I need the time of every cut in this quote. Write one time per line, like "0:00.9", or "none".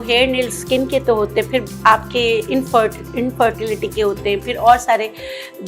none